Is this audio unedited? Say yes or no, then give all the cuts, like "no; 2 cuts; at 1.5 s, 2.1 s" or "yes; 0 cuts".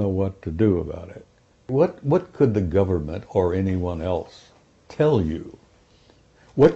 no; 1 cut; at 1.7 s